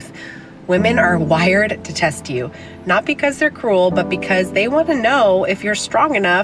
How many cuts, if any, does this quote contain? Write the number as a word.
one